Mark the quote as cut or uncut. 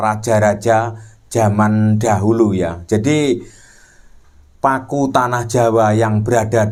uncut